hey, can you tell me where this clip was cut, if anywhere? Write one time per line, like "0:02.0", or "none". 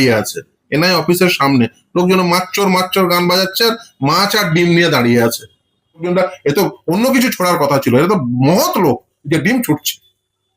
0:06.0